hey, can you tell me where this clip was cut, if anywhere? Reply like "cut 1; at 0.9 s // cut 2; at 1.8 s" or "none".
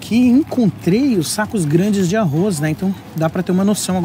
none